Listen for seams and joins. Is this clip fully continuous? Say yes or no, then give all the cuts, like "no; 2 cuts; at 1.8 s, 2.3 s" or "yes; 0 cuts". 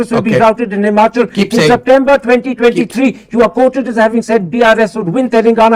yes; 0 cuts